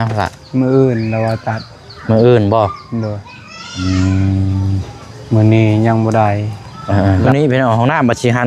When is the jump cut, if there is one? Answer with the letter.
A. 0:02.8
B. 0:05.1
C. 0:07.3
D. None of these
C